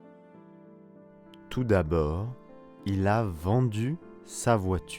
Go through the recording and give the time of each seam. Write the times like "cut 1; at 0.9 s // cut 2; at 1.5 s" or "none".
cut 1; at 1.2 s